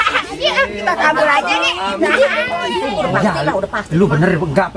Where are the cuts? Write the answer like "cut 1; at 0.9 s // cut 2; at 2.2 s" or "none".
cut 1; at 2.8 s